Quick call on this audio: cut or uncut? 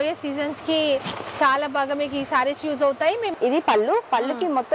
cut